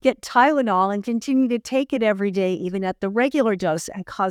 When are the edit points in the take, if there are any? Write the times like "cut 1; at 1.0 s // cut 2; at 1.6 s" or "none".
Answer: none